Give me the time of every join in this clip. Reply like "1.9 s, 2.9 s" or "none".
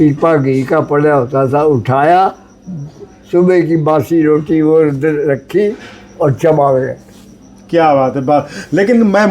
none